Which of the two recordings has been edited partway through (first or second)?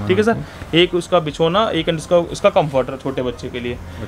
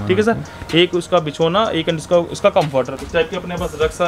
second